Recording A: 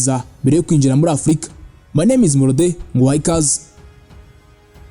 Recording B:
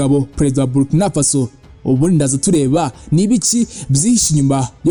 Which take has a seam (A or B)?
A